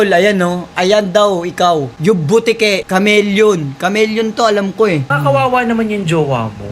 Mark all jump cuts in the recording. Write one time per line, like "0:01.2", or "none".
0:02.0
0:05.0

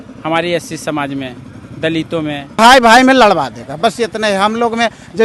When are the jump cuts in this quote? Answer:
0:02.6

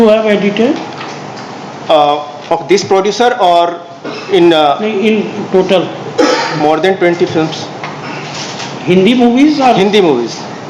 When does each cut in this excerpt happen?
none

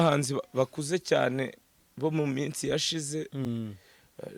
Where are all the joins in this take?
none

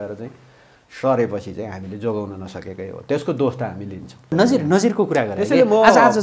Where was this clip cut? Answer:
0:04.3

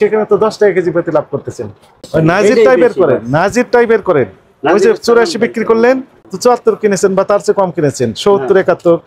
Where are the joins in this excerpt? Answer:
0:02.1
0:06.2

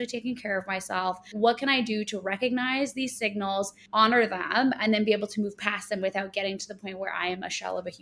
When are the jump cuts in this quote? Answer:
0:01.3
0:03.8

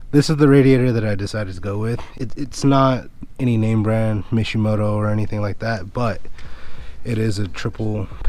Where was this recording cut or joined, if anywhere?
0:02.1

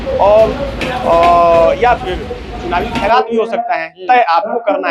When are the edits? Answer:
none

